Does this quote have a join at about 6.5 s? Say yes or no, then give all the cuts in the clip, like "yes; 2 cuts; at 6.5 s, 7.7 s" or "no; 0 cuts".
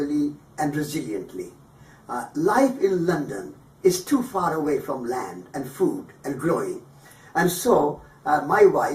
yes; 1 cut; at 6.5 s